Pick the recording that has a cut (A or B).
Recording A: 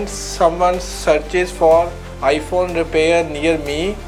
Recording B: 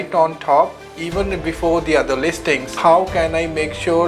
B